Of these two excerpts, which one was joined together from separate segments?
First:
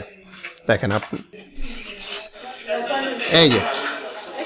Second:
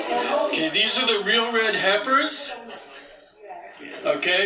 first; 1 cut; at 1.3 s

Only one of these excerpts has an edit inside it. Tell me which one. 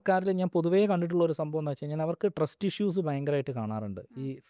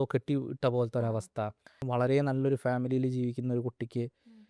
second; 1 cut; at 1.8 s

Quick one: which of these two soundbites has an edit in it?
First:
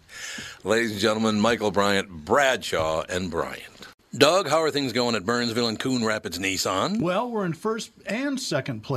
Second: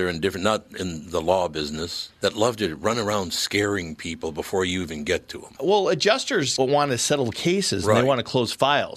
first; 1 cut; at 3.9 s

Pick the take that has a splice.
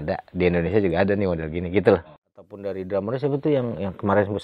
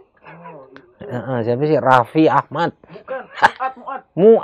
first; 1 cut; at 2.2 s

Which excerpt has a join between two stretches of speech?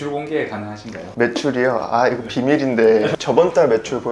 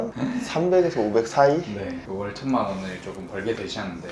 second; 1 cut; at 1.8 s

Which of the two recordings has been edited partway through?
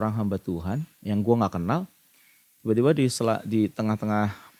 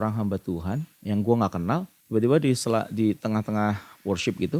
second; 1 cut; at 1.9 s

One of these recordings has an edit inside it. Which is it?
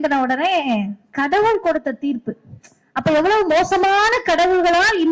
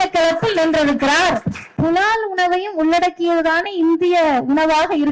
second; 1 cut; at 1.6 s

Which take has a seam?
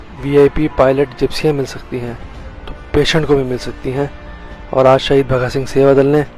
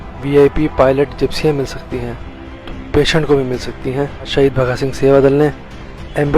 second; 1 cut; at 4.3 s

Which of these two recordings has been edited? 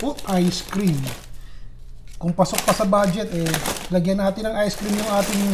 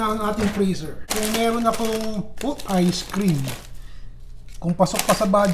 second; 1 cut; at 1.0 s

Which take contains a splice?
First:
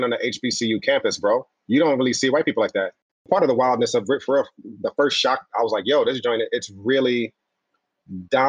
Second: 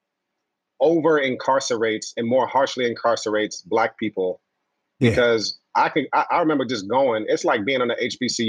first; 1 cut; at 3.2 s

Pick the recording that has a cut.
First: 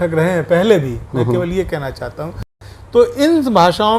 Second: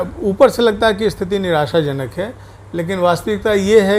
first; 1 cut; at 2.5 s

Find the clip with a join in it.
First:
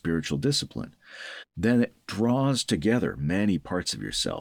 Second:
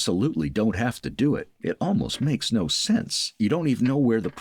second; 1 cut; at 3.3 s

